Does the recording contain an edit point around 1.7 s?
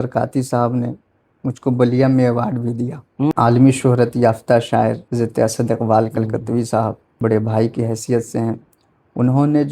no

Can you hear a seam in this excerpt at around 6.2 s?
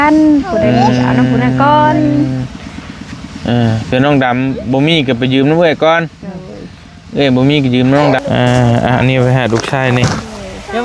no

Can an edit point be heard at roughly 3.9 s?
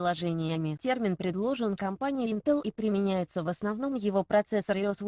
no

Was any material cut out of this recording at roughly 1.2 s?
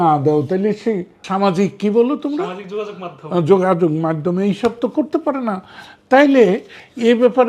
yes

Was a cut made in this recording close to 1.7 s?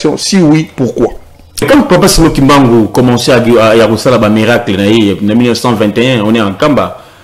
yes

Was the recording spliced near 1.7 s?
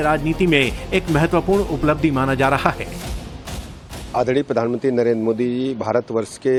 no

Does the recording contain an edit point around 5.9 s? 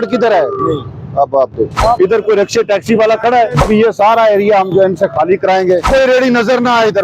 yes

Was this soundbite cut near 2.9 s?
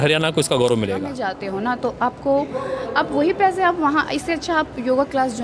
no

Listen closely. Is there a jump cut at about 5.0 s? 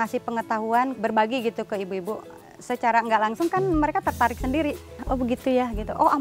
yes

